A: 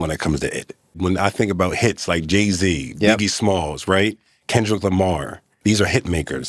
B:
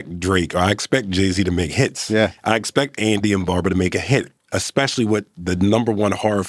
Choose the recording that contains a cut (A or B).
A